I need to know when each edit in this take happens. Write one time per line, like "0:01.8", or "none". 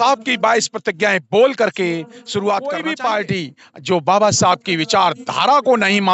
0:02.9

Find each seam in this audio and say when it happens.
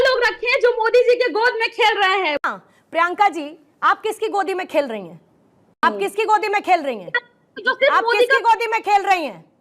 0:02.4
0:05.8

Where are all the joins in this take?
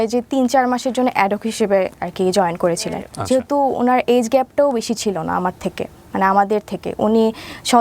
0:03.1

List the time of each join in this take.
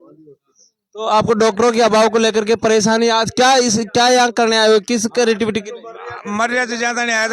none

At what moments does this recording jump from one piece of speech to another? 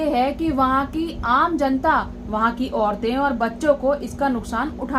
none

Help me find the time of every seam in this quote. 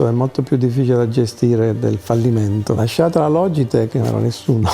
0:02.8

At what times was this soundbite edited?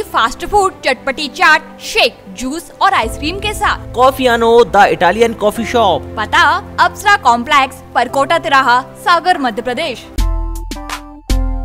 0:10.1

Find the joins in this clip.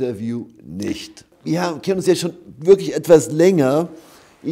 0:01.3

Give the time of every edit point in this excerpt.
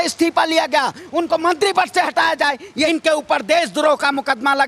0:02.9

